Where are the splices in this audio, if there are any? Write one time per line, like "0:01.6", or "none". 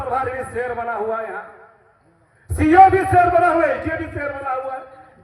none